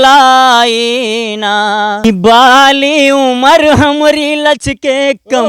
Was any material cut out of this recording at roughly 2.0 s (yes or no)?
yes